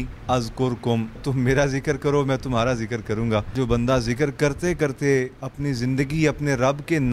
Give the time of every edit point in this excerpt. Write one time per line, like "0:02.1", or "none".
0:01.2
0:03.5